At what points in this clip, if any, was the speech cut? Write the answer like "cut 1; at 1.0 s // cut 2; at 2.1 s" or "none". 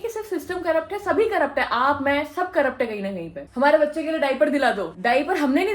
cut 1; at 3.5 s